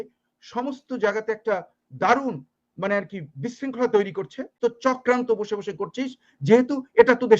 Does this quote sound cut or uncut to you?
cut